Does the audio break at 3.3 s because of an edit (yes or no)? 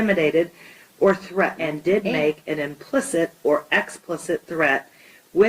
no